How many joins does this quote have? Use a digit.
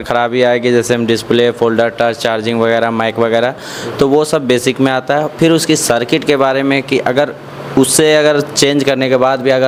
0